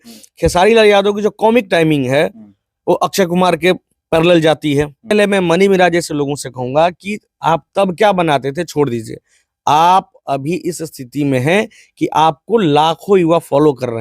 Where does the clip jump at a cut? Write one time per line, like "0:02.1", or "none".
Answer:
0:05.1